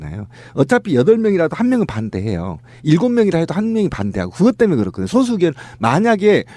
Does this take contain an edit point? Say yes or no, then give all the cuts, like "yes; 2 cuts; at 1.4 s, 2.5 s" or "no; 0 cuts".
yes; 1 cut; at 2.1 s